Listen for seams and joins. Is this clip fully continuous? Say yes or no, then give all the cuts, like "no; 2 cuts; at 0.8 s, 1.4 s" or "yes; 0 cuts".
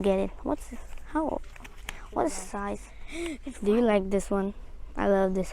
no; 1 cut; at 2.9 s